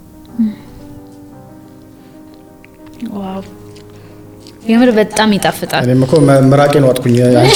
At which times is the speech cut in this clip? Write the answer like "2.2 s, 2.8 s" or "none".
none